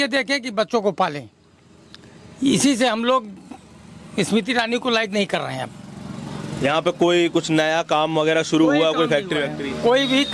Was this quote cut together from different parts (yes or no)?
no